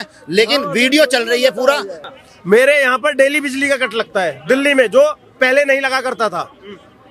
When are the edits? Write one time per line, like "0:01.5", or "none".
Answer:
0:01.9